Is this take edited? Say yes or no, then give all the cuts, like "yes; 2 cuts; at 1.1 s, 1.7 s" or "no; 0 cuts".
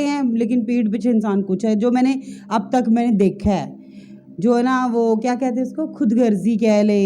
no; 0 cuts